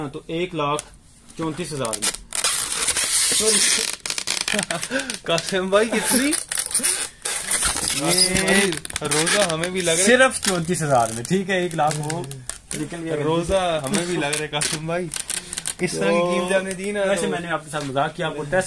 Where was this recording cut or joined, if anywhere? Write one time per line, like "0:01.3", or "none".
none